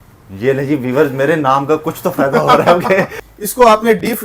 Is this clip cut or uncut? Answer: cut